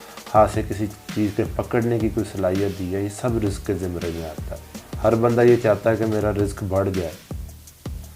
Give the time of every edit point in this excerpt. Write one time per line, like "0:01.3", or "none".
none